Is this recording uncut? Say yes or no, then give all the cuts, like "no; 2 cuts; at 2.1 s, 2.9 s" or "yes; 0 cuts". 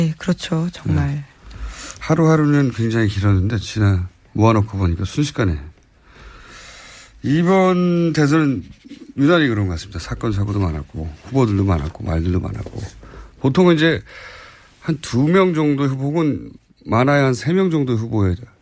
yes; 0 cuts